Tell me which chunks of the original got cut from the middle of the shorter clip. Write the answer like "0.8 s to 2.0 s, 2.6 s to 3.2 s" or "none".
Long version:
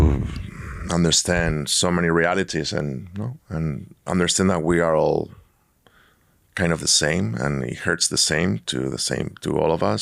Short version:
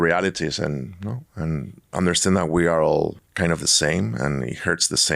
5.4 s to 6.4 s